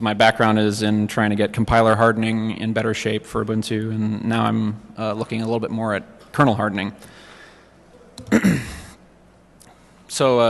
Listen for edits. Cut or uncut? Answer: cut